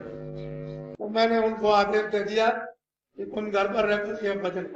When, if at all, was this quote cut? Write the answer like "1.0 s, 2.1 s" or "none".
none